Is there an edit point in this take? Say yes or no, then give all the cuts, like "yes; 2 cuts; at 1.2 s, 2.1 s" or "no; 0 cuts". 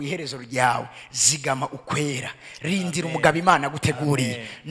no; 0 cuts